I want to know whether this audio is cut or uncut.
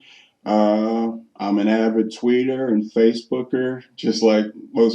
cut